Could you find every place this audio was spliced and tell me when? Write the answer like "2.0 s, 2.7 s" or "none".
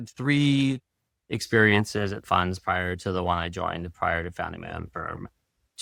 none